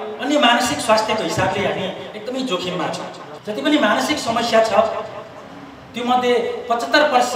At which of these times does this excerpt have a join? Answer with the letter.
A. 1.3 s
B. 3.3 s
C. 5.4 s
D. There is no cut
B